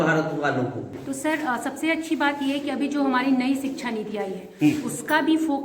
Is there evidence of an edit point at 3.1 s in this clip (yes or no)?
no